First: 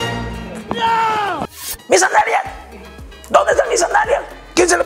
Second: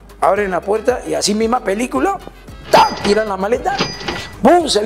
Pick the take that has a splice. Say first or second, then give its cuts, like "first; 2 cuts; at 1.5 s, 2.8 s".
first; 1 cut; at 1.4 s